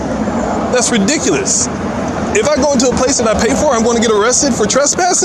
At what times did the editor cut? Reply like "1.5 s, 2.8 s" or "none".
none